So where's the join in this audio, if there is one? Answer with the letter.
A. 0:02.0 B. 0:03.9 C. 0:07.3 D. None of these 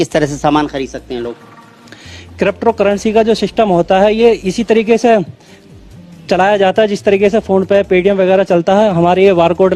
D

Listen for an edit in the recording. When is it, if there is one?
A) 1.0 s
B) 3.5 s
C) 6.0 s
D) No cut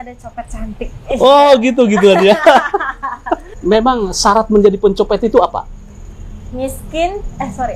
B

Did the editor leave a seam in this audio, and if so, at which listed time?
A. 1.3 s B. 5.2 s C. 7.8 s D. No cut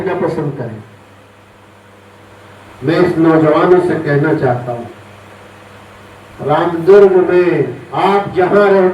A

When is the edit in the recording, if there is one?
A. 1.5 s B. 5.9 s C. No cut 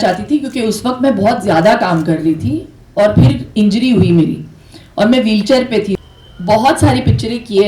B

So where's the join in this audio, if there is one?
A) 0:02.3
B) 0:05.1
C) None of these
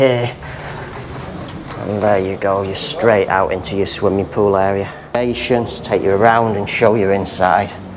B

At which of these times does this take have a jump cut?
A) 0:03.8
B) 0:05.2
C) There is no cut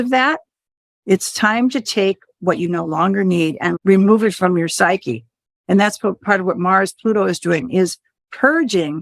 A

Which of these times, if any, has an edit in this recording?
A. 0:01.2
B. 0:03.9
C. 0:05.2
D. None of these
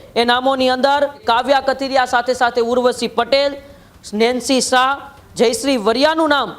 A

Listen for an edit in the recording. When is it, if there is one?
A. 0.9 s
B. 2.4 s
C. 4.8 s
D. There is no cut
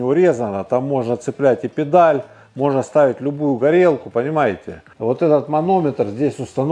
C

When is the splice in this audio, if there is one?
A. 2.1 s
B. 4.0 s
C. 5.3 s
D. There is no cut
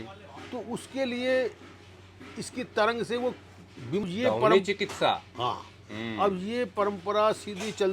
B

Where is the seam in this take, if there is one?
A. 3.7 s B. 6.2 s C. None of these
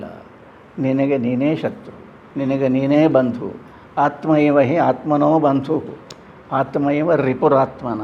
C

